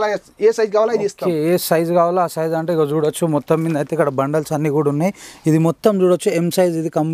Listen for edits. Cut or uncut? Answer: uncut